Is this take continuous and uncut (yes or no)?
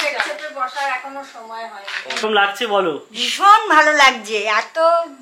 no